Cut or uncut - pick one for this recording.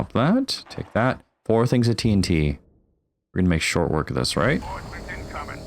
cut